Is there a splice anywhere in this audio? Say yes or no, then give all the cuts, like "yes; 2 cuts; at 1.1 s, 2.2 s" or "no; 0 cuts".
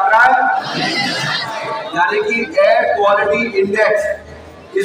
yes; 1 cut; at 1.8 s